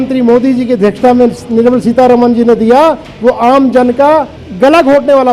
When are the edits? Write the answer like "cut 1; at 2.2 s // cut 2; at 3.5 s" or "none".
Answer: cut 1; at 4.4 s